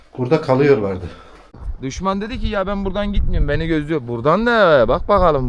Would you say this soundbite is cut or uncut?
cut